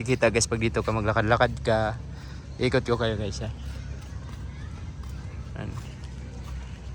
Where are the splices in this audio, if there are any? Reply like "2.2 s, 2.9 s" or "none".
none